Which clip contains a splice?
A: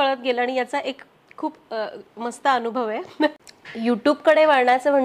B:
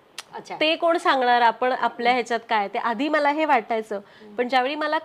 A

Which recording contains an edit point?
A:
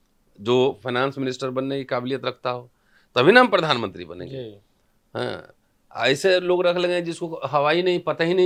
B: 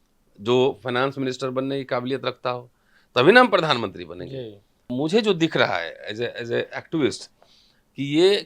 B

